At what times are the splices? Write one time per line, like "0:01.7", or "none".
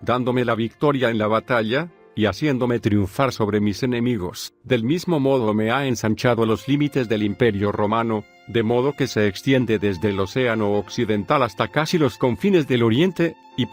none